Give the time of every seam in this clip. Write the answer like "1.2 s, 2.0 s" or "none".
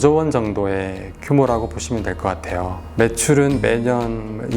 2.8 s